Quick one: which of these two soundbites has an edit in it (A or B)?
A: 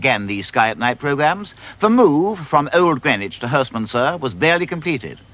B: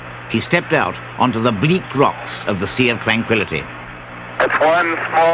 B